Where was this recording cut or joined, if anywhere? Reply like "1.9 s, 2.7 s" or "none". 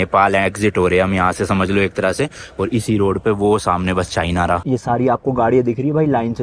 4.6 s